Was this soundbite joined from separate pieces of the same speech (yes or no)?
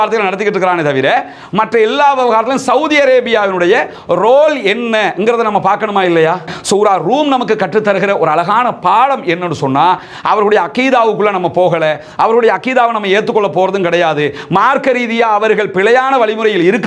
yes